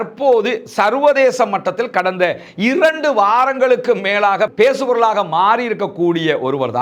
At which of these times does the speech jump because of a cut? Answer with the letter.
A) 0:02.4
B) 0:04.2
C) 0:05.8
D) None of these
D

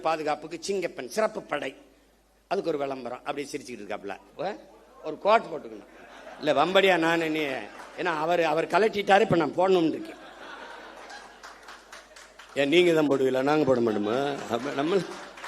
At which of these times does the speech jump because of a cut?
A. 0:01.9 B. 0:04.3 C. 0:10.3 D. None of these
B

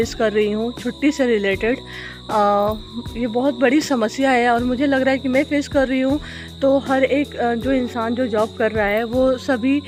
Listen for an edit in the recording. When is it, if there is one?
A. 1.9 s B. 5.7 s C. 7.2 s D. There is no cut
D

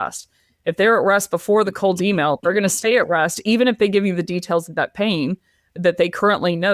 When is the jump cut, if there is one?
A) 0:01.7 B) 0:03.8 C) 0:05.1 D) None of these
A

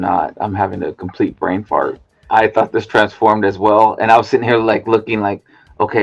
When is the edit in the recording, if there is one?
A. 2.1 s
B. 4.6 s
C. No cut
A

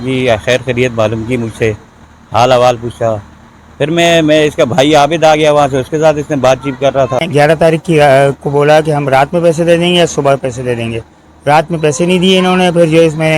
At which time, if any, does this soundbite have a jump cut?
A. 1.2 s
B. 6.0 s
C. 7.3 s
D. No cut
C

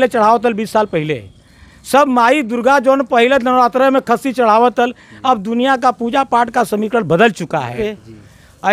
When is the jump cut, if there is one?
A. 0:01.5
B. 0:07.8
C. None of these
B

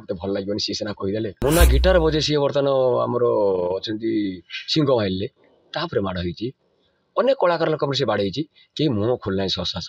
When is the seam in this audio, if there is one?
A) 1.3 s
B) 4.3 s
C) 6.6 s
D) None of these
A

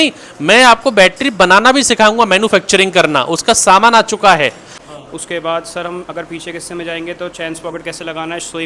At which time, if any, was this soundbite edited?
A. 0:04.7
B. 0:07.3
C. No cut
A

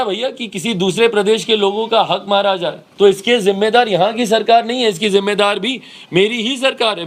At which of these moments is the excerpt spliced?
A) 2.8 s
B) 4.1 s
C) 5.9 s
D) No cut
A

